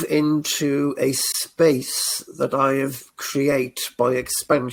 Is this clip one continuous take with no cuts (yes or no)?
yes